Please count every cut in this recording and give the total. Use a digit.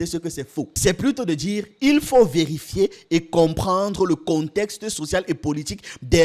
0